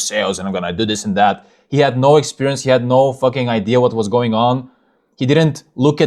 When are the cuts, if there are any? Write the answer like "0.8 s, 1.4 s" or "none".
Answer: none

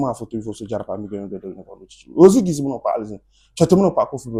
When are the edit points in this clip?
none

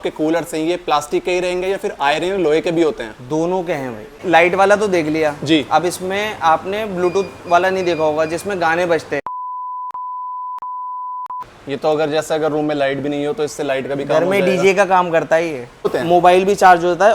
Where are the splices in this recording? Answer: 4.2 s, 9.5 s, 11.4 s, 15.9 s

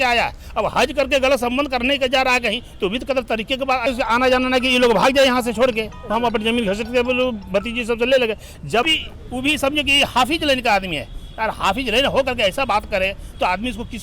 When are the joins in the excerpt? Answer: 3.9 s, 8.8 s

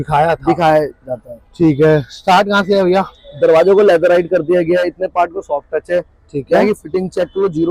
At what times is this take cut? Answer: none

